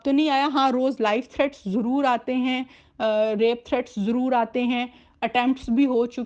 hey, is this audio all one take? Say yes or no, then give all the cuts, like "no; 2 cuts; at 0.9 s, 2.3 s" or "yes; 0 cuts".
yes; 0 cuts